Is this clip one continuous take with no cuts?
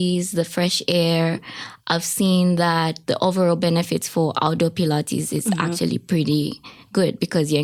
yes; 0 cuts

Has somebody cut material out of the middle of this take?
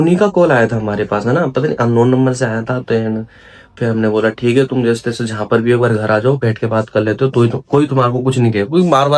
no; 0 cuts

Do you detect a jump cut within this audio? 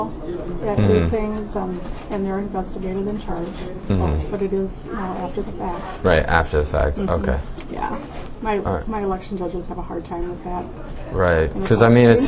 no; 0 cuts

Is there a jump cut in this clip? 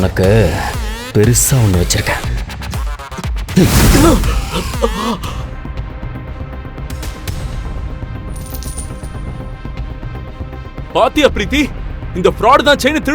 yes; 1 cut; at 5.4 s

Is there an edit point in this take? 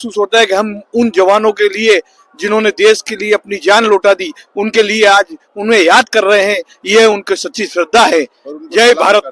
no; 0 cuts

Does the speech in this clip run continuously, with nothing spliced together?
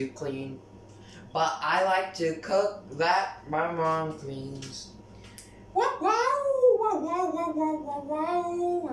yes; 0 cuts

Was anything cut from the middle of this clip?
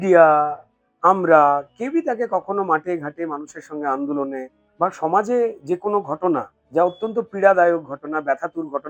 yes; 2 cuts; at 4.6 s, 6.6 s

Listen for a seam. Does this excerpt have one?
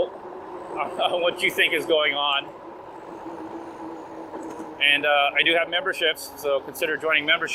no; 0 cuts

